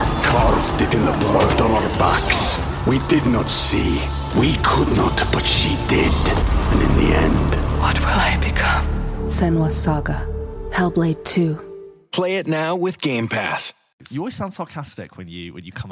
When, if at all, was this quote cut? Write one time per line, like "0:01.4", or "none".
0:13.8